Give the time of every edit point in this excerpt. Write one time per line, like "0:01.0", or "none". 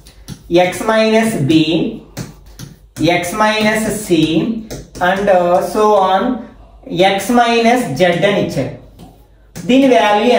none

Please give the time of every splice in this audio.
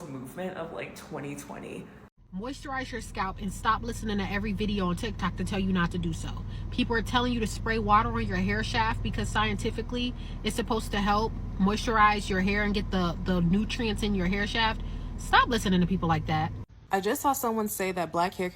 0:02.1
0:16.8

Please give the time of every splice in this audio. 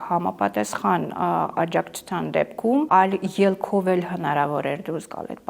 0:02.9

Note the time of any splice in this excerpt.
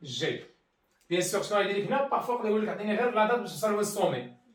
none

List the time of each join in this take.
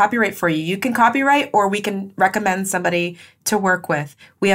none

